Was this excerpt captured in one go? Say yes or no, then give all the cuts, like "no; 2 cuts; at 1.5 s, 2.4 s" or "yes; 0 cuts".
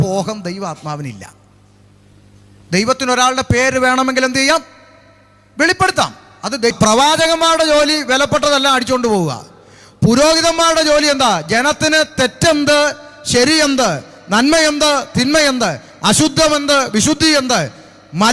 no; 1 cut; at 6.7 s